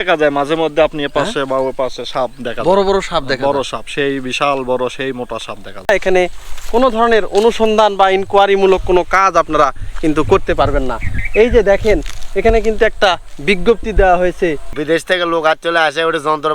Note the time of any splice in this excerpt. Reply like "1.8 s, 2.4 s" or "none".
5.9 s, 14.7 s